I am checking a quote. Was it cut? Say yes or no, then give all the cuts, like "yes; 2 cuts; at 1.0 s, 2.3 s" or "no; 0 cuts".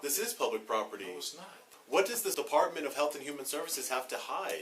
yes; 2 cuts; at 1.7 s, 2.3 s